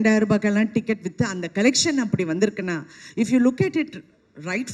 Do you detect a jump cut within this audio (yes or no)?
no